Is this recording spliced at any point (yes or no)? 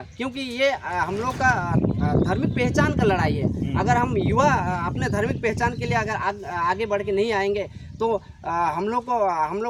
no